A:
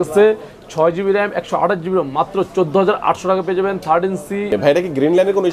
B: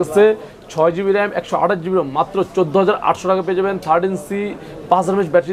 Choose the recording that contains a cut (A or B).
A